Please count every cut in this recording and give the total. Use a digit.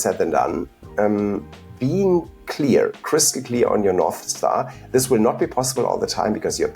0